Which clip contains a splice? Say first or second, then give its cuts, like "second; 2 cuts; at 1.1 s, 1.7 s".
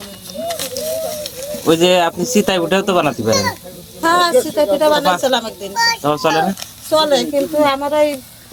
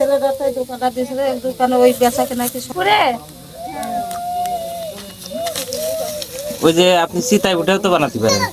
second; 1 cut; at 2.7 s